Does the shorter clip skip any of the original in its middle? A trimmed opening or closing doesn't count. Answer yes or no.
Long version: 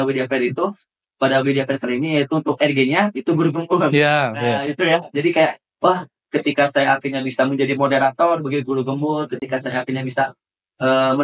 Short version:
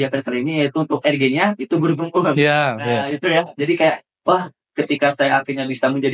no